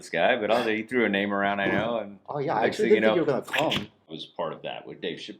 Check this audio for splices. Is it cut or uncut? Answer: cut